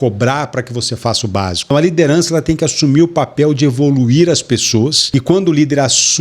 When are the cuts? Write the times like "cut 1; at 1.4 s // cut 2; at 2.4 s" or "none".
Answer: cut 1; at 1.7 s // cut 2; at 5.0 s

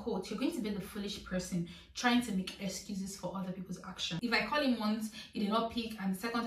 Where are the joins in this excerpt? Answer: cut 1; at 4.1 s

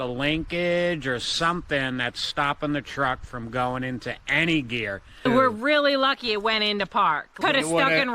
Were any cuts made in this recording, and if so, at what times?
cut 1; at 5.2 s // cut 2; at 7.4 s

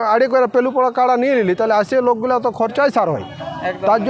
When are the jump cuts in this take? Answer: none

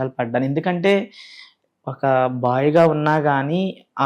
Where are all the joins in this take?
none

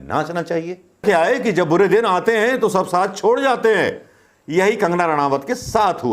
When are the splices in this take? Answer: cut 1; at 1.0 s

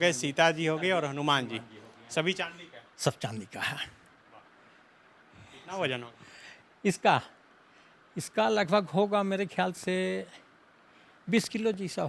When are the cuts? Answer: none

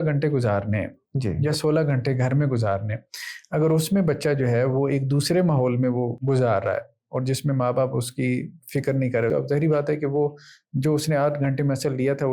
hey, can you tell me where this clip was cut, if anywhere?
cut 1; at 6.2 s // cut 2; at 9.3 s

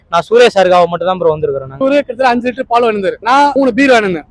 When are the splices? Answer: cut 1; at 1.7 s // cut 2; at 3.5 s

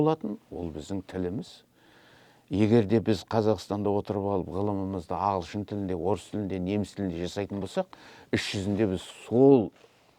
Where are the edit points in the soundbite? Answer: none

